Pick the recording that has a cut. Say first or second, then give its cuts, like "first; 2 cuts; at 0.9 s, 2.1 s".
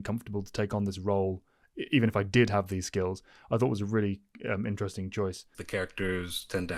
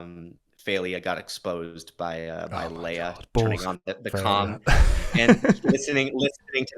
first; 1 cut; at 5.6 s